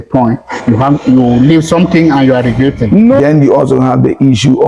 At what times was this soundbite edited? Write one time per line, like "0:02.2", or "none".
0:03.1